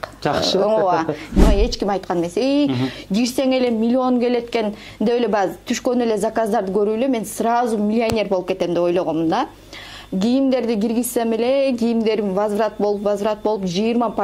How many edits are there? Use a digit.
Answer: 1